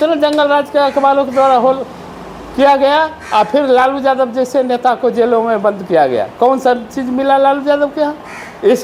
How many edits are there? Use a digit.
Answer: 0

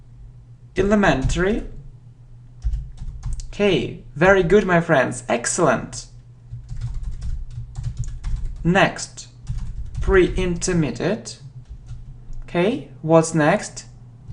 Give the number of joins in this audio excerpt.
0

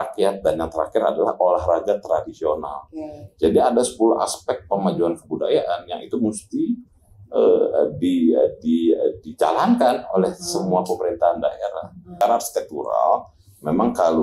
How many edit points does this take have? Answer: 1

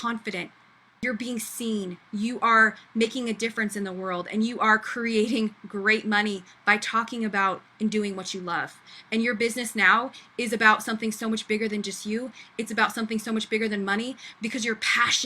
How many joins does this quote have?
1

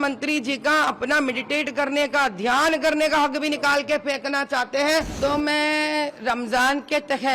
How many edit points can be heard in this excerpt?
1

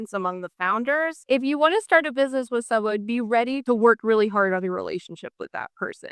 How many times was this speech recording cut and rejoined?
2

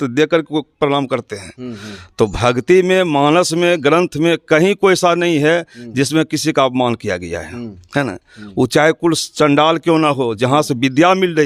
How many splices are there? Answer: 0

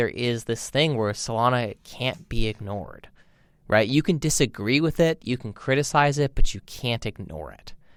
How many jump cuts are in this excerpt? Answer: 0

